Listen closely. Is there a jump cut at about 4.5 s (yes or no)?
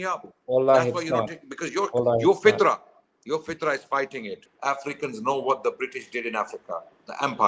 yes